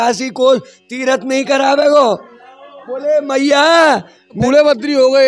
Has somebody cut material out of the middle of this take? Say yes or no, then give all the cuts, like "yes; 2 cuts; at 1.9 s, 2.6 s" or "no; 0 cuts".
yes; 1 cut; at 4.4 s